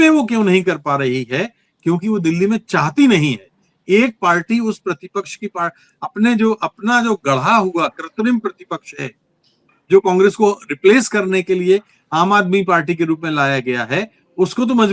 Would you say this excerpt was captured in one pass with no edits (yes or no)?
yes